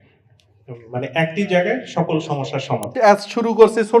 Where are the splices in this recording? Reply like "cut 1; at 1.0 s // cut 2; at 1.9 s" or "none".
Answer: cut 1; at 2.9 s